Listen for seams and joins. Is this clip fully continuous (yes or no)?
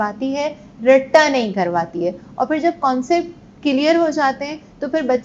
yes